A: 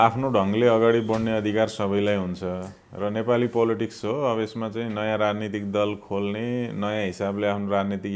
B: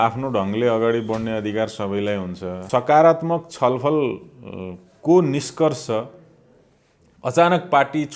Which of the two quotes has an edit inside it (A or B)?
B